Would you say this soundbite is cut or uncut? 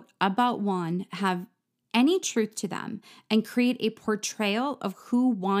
uncut